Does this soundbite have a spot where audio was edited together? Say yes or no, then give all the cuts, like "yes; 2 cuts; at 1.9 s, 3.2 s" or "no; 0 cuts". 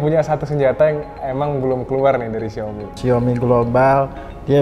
yes; 1 cut; at 2.9 s